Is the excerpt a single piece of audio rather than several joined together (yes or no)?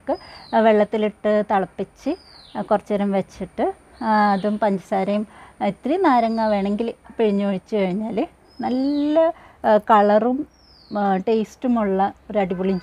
yes